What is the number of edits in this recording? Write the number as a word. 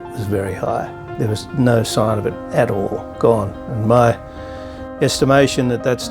one